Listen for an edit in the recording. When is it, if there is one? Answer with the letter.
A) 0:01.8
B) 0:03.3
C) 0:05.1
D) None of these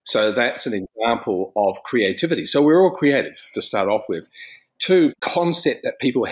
C